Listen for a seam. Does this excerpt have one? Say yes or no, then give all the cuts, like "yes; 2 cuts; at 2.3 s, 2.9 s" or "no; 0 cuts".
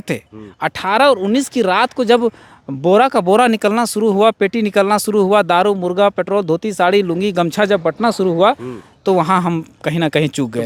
no; 0 cuts